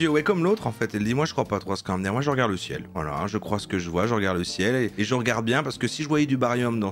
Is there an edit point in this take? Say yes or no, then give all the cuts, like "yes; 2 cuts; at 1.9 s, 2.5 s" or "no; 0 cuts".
no; 0 cuts